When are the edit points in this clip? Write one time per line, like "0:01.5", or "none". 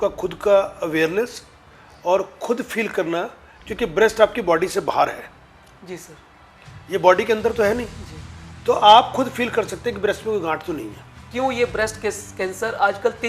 0:11.2